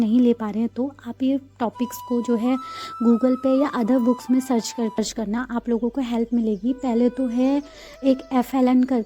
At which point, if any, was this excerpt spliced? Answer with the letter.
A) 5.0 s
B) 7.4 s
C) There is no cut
A